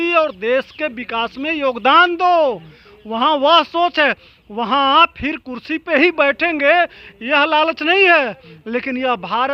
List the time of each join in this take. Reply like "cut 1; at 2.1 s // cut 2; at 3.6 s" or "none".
none